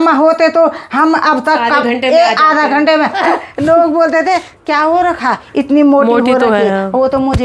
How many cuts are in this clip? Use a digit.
1